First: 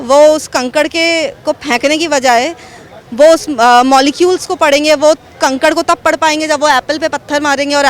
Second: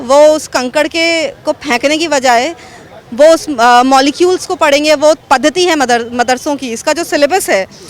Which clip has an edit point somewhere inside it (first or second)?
second